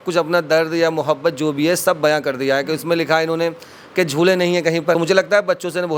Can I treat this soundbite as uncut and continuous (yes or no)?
no